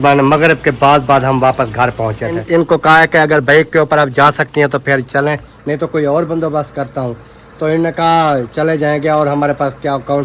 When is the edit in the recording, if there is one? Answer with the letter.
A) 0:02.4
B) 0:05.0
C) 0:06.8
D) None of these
A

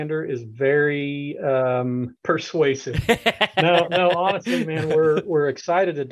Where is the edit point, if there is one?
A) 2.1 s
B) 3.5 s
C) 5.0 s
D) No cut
A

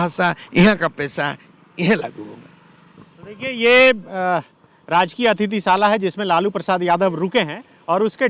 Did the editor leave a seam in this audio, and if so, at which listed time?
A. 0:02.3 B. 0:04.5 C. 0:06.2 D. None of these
D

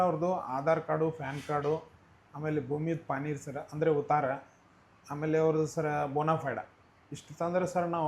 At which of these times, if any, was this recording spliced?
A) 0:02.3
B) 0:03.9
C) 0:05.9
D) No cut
D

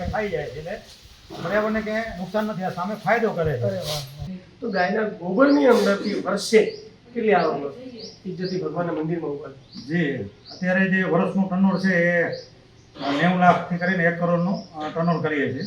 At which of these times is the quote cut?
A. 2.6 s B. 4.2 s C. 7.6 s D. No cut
B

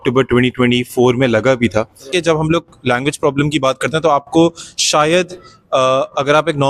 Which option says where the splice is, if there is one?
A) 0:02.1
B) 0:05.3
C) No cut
A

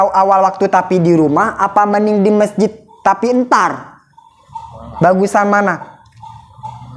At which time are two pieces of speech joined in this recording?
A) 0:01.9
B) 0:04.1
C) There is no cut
C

